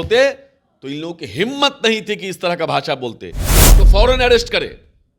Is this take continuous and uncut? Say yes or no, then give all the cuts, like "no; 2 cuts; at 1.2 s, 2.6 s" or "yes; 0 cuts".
no; 1 cut; at 3.7 s